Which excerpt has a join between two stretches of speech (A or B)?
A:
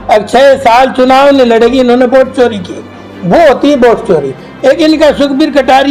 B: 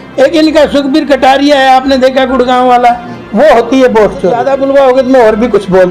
B